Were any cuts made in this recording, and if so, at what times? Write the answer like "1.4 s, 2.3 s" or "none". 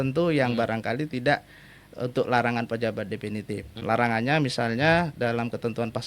3.8 s